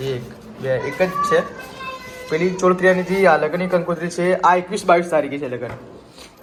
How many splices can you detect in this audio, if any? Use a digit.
0